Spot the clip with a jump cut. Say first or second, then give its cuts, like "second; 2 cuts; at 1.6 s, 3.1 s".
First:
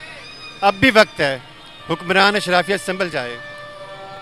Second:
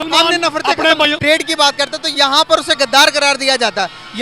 second; 1 cut; at 1.2 s